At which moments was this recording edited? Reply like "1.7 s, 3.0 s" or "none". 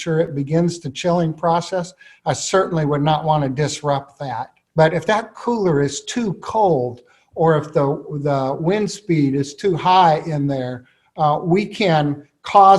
4.5 s